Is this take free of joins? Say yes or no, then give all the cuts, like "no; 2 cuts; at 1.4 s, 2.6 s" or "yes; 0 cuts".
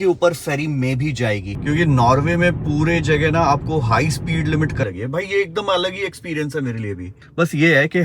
no; 3 cuts; at 1.5 s, 4.8 s, 7.1 s